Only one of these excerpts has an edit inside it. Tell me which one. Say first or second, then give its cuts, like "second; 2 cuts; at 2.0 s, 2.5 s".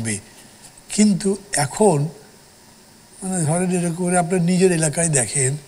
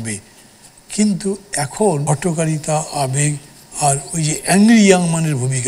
second; 1 cut; at 2.0 s